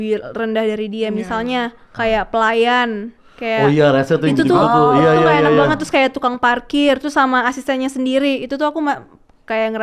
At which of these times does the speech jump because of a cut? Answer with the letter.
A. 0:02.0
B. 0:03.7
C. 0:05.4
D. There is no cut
D